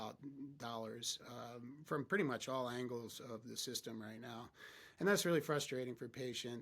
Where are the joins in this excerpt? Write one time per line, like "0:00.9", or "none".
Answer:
none